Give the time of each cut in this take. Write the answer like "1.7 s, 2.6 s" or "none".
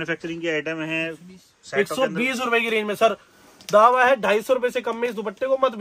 none